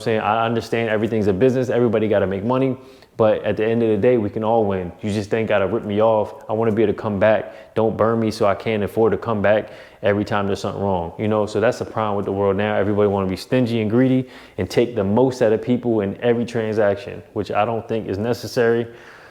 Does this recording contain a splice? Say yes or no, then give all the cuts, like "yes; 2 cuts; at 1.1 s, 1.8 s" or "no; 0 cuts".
no; 0 cuts